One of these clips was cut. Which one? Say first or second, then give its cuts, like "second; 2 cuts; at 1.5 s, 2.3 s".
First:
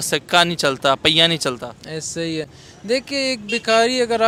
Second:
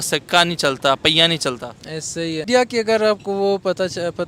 second; 1 cut; at 2.5 s